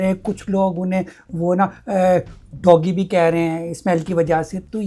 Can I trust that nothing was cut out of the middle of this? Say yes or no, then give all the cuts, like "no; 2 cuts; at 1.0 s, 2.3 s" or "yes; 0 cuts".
yes; 0 cuts